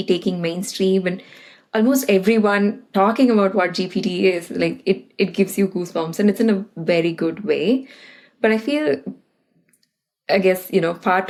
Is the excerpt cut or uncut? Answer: uncut